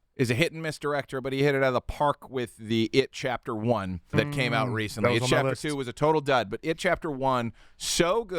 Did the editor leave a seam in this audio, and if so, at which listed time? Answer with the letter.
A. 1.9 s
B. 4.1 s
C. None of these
B